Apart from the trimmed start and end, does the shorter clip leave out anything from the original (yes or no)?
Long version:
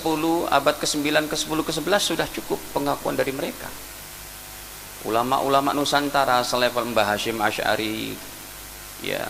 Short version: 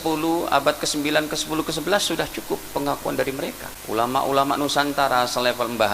yes